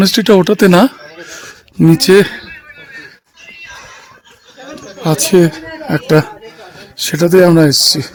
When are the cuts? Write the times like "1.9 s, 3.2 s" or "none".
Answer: none